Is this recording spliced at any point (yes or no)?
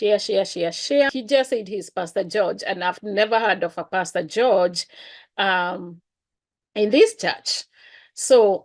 yes